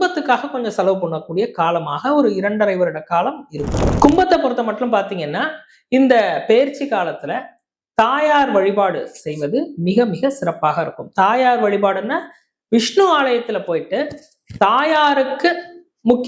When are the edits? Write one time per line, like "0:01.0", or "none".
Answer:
0:03.9